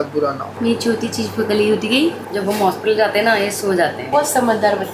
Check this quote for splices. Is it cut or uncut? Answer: cut